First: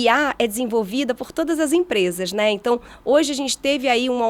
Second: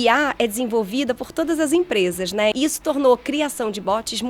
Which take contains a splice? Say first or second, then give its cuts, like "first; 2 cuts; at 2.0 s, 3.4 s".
second; 1 cut; at 2.5 s